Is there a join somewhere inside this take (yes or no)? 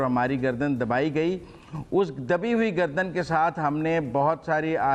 no